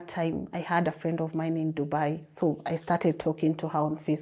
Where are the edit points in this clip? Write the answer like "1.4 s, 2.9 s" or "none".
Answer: none